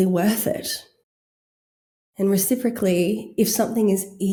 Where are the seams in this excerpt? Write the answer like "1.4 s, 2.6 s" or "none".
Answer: none

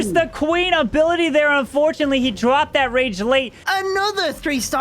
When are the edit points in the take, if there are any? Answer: 3.6 s

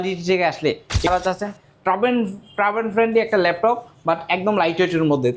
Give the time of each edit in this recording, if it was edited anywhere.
1.1 s

